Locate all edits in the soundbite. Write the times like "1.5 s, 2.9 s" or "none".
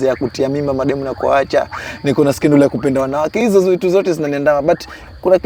none